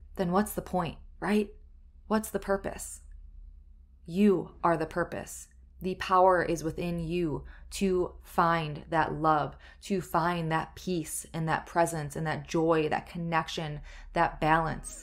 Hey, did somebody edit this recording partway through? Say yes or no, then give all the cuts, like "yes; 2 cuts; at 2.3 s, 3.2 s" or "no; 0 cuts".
no; 0 cuts